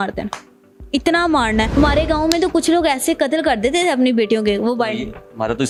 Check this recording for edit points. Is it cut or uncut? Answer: uncut